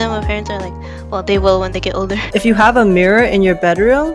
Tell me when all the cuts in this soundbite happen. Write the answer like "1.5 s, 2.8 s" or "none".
2.2 s